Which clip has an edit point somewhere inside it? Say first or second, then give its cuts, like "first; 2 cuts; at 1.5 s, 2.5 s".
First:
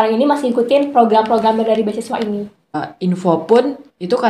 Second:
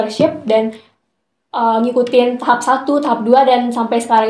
first; 1 cut; at 2.8 s